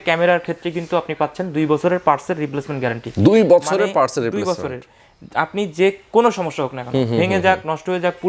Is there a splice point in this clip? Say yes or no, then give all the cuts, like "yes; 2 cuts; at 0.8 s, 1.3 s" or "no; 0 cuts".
no; 0 cuts